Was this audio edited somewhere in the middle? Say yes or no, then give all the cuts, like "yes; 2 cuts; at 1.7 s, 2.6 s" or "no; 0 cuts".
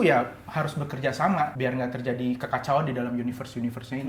no; 0 cuts